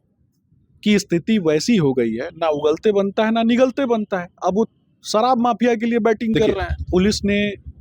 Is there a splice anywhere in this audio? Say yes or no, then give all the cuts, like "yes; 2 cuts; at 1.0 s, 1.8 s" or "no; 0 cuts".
yes; 1 cut; at 6.7 s